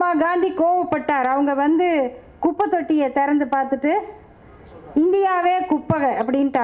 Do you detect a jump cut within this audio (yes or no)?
no